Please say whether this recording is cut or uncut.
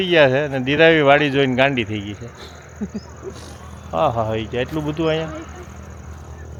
uncut